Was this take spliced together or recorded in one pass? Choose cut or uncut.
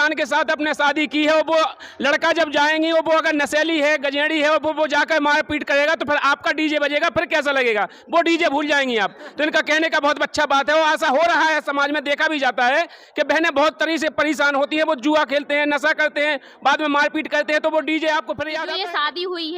cut